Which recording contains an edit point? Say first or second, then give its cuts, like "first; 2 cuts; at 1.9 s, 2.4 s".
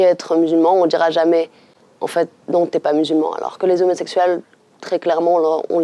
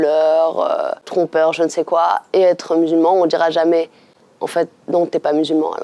second; 1 cut; at 1.1 s